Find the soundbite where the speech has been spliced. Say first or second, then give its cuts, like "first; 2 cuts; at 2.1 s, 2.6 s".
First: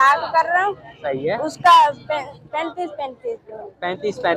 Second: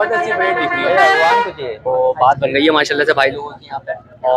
second; 1 cut; at 1.8 s